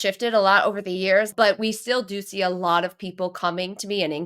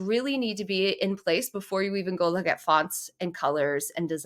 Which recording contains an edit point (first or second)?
first